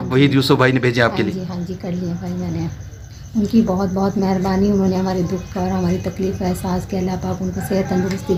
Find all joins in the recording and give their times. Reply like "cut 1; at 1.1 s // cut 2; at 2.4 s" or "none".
none